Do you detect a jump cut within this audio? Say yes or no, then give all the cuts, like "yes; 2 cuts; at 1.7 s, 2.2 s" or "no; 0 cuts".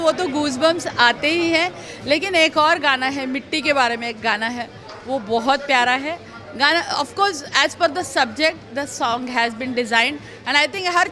no; 0 cuts